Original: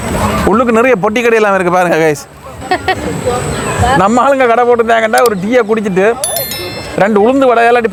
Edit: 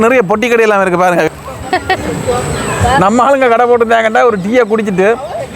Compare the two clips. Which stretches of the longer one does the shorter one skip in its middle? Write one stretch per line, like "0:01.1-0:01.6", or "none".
0:02.0-0:02.3